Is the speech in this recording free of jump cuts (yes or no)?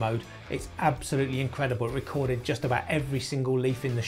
yes